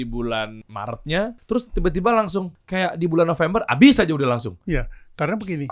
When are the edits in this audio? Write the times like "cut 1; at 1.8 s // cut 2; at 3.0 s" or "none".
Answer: cut 1; at 1.2 s // cut 2; at 2.6 s